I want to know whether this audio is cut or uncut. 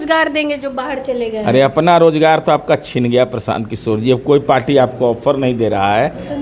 uncut